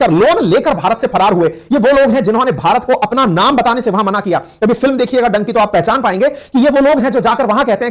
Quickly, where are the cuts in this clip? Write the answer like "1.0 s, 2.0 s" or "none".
none